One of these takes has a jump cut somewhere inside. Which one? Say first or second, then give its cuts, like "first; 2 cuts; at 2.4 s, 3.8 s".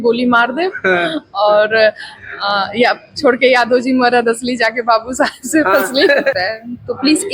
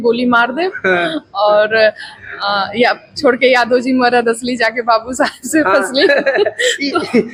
first; 1 cut; at 6.3 s